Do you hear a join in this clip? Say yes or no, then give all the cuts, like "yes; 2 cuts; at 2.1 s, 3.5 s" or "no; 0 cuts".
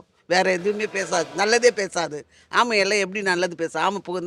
no; 0 cuts